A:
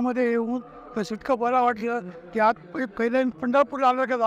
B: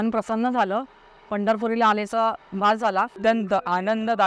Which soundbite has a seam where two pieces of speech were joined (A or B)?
B